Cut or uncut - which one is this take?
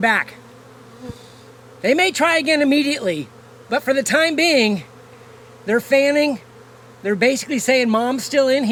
uncut